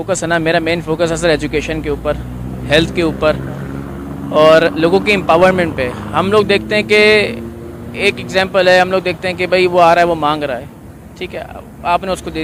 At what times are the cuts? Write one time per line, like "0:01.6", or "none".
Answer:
none